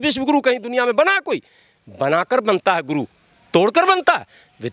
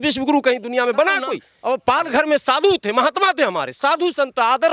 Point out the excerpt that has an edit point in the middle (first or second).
second